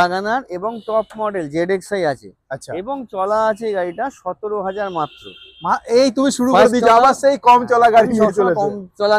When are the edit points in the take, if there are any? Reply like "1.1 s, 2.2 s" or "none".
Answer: none